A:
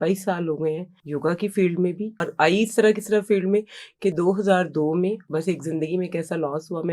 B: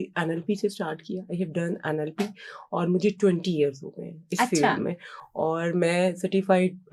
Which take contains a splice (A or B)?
A